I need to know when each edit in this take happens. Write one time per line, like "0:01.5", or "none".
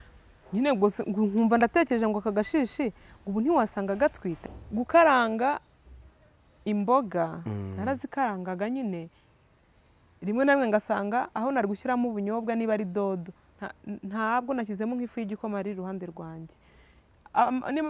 0:04.4